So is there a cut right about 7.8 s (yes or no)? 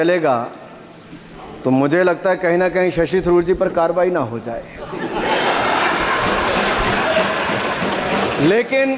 no